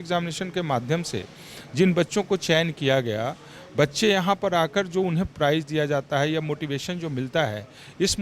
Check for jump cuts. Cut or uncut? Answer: uncut